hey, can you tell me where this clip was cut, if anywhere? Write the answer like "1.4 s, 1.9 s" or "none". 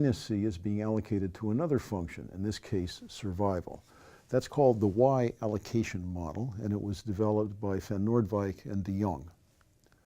7.2 s